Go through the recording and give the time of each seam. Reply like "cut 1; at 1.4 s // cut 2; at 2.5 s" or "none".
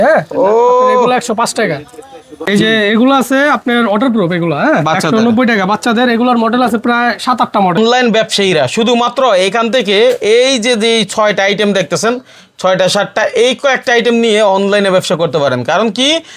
cut 1; at 2.4 s // cut 2; at 7.8 s